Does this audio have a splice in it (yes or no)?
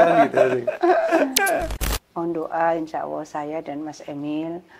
yes